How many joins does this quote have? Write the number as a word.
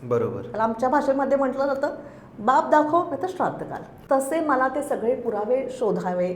one